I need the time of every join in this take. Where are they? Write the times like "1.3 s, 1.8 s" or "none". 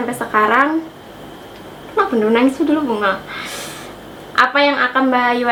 none